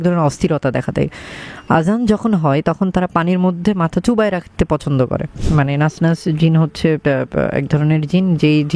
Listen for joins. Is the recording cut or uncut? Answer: cut